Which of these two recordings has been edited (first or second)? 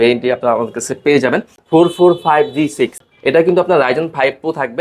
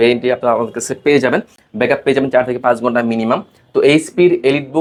first